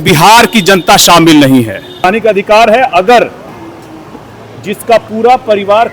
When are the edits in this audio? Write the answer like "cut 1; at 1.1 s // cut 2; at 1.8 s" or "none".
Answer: cut 1; at 2.0 s